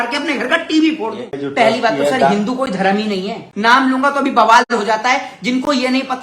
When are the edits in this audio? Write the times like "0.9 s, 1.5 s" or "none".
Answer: 1.3 s, 3.4 s